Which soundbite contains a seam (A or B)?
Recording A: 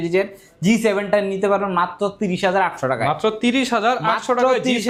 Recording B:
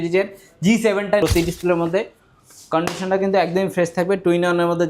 B